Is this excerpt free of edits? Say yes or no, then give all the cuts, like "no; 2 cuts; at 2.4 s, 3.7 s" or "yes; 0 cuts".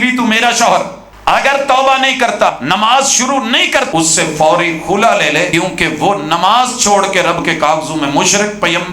no; 4 cuts; at 1.0 s, 2.5 s, 3.9 s, 5.5 s